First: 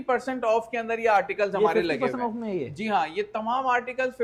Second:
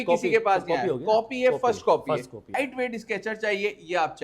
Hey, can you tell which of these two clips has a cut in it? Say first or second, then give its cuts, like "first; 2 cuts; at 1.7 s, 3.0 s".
second; 1 cut; at 2.5 s